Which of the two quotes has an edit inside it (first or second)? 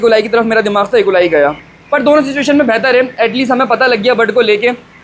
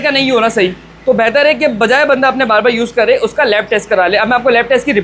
first